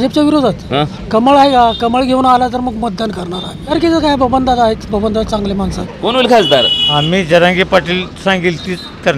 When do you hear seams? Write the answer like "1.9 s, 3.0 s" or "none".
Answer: 3.7 s, 5.9 s